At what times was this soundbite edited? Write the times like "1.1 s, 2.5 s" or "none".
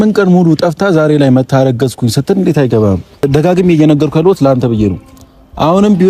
3.2 s